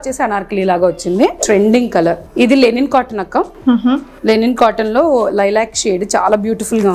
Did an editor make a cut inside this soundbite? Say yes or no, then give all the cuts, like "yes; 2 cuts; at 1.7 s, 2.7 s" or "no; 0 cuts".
yes; 2 cuts; at 1.4 s, 2.2 s